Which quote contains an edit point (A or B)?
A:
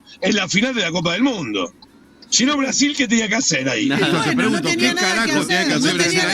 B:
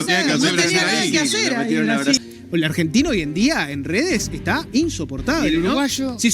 B